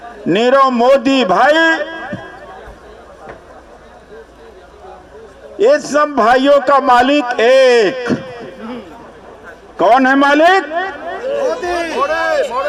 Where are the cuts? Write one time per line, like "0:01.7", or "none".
none